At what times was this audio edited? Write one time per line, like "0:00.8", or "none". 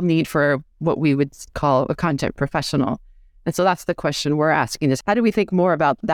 0:05.0